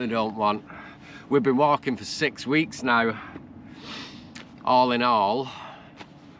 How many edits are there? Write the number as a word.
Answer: zero